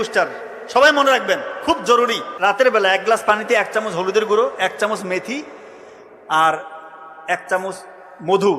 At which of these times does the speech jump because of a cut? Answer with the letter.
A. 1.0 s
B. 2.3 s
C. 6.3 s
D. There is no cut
B